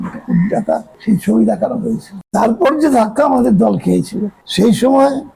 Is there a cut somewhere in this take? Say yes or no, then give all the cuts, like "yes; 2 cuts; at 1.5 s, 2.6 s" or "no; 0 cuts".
no; 0 cuts